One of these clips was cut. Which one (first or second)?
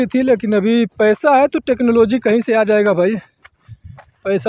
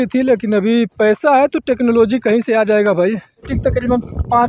second